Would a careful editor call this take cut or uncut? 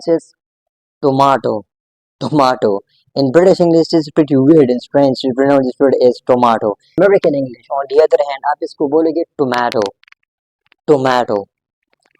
cut